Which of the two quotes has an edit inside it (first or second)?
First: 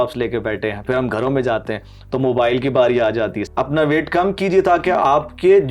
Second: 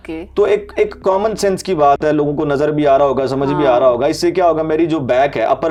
first